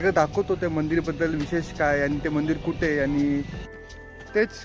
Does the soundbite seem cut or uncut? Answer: cut